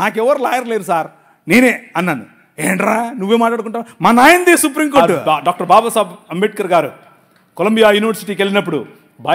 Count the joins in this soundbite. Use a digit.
1